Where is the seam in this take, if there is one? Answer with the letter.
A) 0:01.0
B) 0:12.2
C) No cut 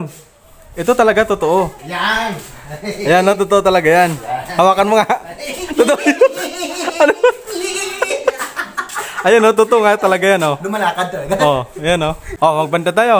B